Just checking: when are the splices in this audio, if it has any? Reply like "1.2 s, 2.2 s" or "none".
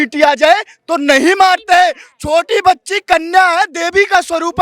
none